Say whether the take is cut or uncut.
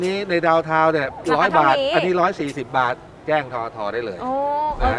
uncut